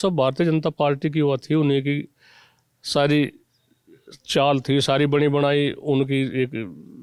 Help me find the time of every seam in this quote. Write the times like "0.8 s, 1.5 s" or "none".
none